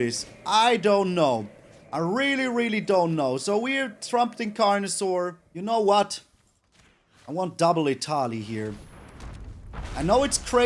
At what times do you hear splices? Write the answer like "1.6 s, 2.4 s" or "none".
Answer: 5.5 s